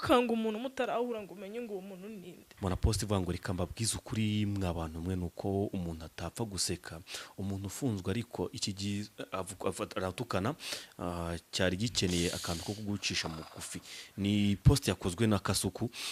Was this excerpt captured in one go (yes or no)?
no